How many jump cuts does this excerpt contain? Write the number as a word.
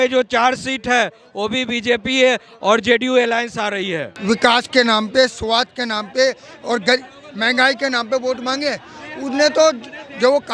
one